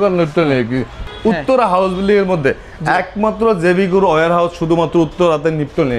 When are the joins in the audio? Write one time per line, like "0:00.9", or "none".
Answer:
0:01.0